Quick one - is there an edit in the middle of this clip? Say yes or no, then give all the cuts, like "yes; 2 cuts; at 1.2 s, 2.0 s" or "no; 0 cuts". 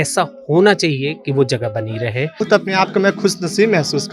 yes; 1 cut; at 2.3 s